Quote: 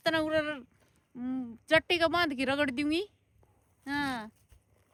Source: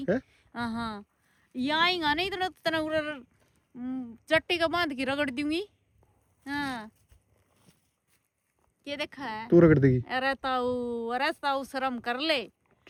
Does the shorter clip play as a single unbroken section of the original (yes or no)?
yes